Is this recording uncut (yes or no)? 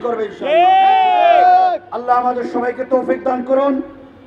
yes